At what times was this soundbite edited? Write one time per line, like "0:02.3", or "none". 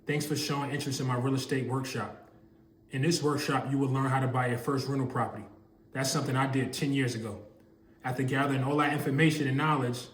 none